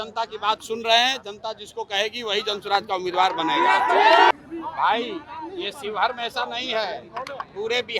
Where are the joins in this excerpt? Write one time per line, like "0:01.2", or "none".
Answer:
0:04.3